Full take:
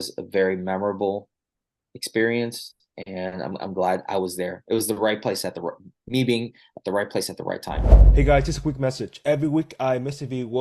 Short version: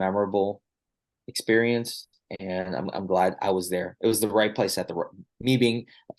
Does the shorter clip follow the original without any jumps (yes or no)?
yes